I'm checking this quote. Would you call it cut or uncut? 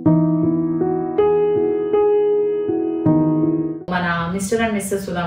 cut